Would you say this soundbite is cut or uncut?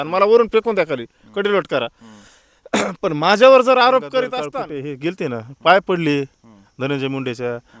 cut